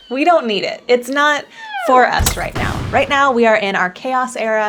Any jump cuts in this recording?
no; 0 cuts

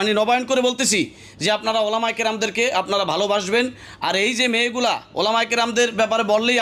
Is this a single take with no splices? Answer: yes; 0 cuts

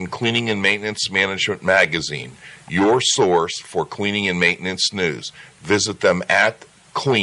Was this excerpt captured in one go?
yes; 0 cuts

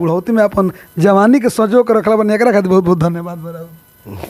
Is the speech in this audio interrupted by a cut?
no; 0 cuts

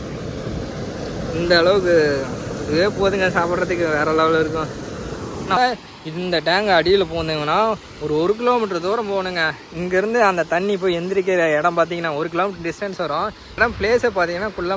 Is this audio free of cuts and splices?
no; 2 cuts; at 5.6 s, 13.6 s

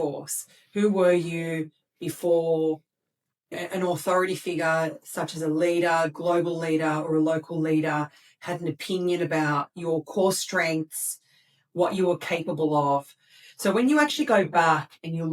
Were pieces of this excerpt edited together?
yes; 1 cut; at 3.6 s

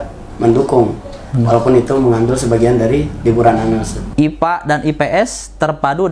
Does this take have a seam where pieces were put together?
yes; 1 cut; at 4.0 s

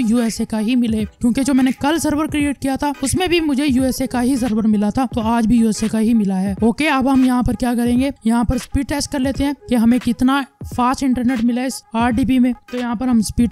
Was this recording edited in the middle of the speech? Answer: no; 0 cuts

